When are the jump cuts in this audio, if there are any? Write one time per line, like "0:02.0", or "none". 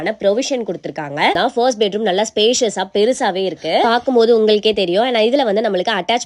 0:01.4